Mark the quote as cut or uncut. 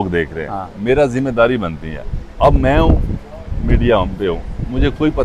uncut